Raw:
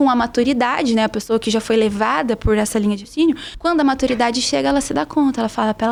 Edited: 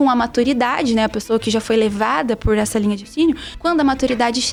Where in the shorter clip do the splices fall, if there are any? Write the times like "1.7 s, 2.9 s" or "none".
none